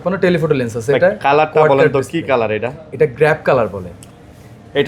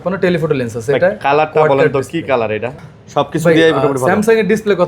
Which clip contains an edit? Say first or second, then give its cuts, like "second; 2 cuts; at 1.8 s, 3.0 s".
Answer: second; 1 cut; at 2.8 s